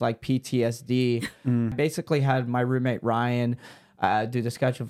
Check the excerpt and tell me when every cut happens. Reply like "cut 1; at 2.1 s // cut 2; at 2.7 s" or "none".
cut 1; at 1.7 s